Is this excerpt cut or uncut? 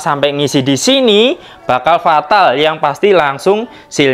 uncut